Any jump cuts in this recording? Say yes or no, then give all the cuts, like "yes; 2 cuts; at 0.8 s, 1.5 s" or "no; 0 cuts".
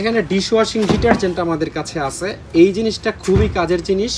no; 0 cuts